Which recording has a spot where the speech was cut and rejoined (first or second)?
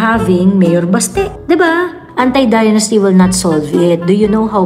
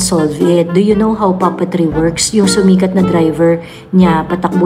first